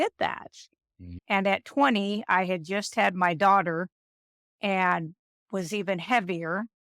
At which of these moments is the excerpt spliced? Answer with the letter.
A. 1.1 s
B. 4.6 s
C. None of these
A